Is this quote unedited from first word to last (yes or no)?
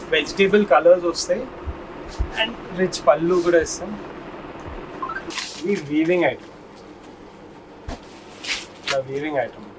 no